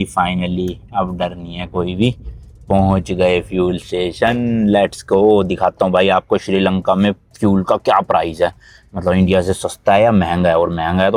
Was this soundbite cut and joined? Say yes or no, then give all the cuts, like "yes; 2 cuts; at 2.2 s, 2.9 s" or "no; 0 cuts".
no; 0 cuts